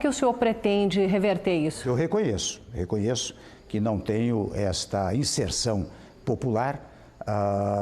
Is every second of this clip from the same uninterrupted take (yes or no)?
no